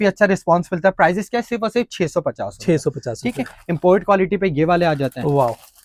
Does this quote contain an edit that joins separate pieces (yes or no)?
no